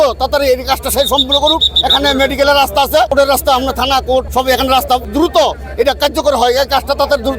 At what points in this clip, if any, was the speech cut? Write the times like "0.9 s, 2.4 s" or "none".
3.1 s, 4.3 s, 5.1 s